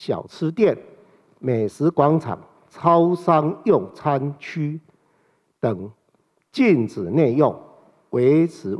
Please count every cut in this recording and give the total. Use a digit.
0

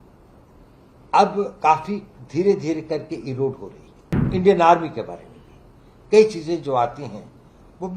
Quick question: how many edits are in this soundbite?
1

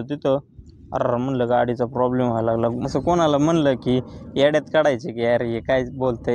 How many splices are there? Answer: 1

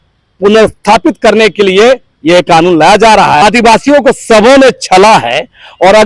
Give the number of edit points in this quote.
1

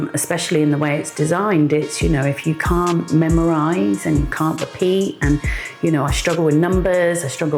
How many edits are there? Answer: 0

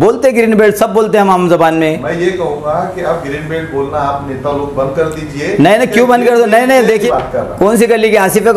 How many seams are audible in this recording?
1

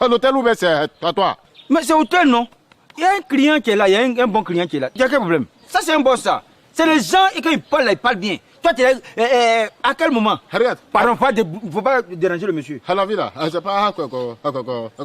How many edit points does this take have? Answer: 1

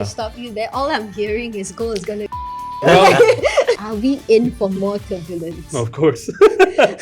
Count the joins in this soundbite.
1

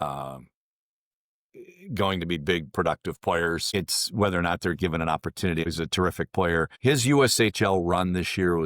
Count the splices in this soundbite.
3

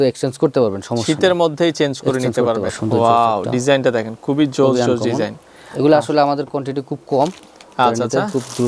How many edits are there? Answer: 1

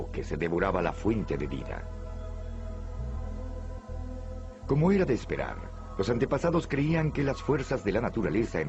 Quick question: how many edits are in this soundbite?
1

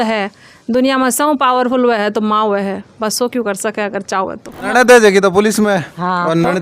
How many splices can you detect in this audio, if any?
1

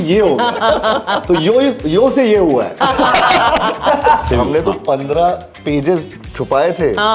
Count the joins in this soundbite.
1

